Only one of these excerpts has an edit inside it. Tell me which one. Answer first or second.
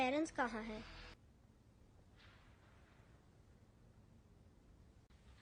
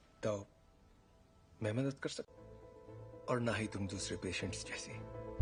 first